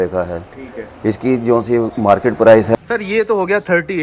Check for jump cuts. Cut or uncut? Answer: cut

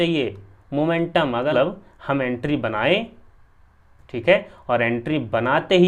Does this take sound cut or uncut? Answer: cut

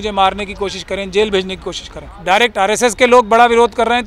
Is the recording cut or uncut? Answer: cut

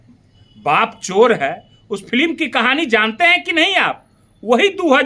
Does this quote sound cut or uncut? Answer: uncut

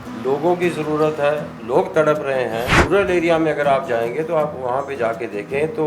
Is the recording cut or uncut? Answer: cut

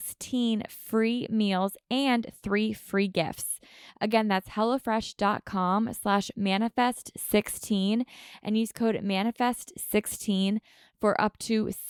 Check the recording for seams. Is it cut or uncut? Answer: uncut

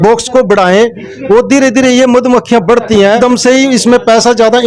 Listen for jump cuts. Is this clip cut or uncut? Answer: cut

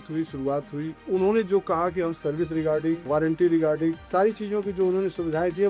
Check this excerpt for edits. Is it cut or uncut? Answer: cut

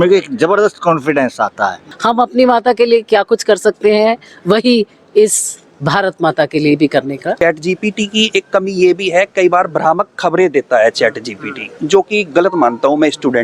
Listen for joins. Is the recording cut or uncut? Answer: cut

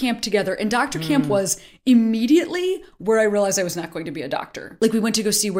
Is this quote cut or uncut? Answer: cut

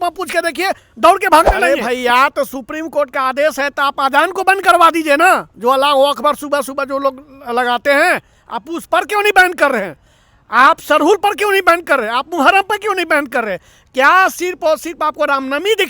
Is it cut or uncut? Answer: cut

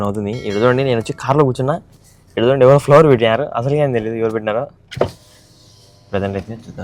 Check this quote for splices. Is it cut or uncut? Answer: uncut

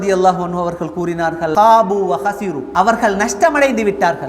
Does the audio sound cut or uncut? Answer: cut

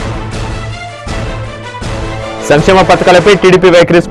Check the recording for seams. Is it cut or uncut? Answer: cut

